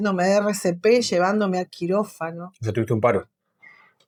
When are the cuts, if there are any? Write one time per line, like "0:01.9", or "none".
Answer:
none